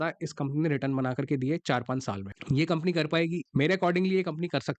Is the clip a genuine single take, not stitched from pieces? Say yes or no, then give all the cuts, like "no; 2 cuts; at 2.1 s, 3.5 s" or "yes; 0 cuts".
no; 1 cut; at 3.4 s